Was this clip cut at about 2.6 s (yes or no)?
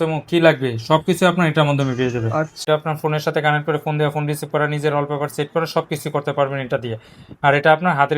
yes